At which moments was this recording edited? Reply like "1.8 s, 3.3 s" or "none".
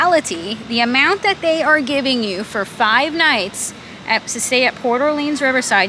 none